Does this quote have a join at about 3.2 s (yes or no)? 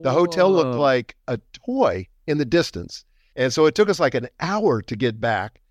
yes